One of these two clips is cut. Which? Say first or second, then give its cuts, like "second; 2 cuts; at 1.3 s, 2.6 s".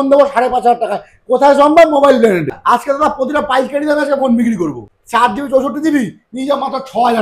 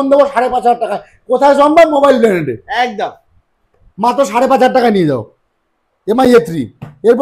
first; 2 cuts; at 2.6 s, 4.9 s